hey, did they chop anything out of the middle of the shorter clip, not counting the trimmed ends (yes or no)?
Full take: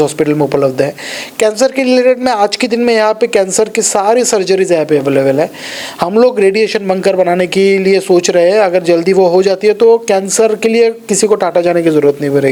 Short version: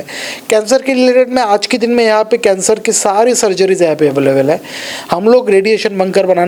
no